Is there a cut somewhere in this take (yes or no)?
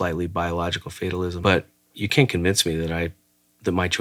yes